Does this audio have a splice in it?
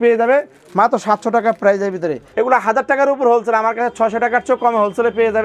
yes; 1 cut; at 2.2 s

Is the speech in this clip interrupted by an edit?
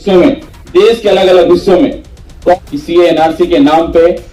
yes; 1 cut; at 2.6 s

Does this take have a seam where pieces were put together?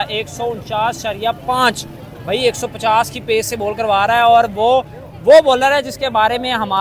no; 0 cuts

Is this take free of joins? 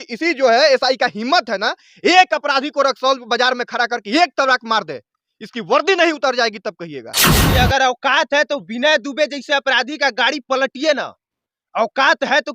no; 1 cut; at 7.4 s

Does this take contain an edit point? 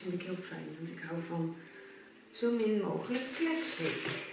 no; 0 cuts

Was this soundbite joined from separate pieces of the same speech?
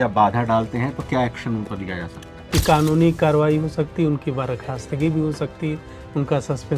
yes; 1 cut; at 2.3 s

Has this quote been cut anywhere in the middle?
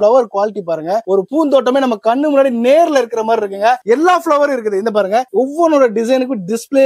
no; 0 cuts

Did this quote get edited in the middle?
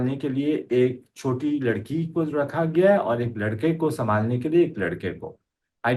no; 0 cuts

